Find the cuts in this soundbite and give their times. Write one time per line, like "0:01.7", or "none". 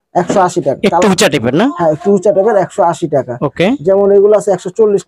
none

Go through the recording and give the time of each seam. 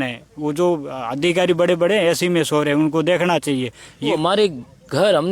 0:04.1

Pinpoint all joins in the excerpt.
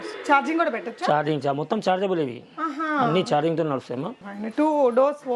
0:04.2

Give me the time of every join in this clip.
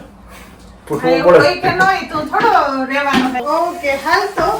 0:03.4

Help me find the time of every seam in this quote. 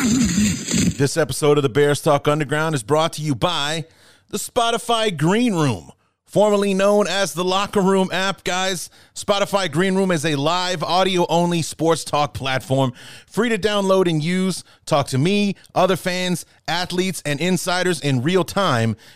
0:00.9

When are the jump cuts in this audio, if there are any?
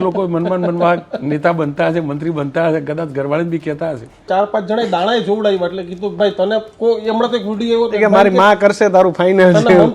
0:04.2

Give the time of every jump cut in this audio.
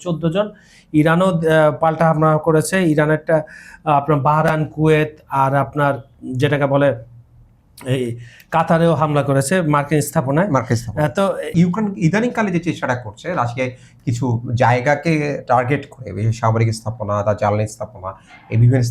0:11.5

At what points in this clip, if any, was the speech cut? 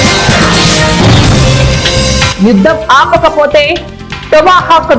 none

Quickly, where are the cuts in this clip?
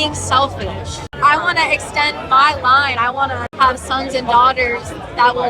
0:01.1
0:03.4

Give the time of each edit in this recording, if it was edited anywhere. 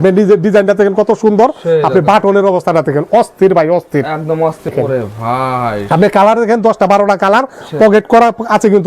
0:04.7

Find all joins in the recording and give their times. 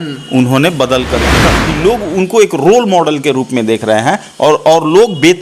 0:01.4

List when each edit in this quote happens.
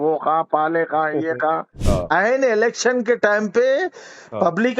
0:01.7

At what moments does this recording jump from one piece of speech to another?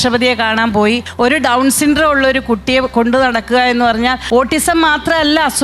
0:01.1
0:04.2

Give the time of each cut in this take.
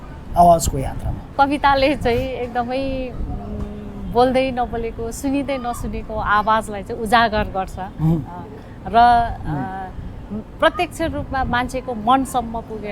0:01.2

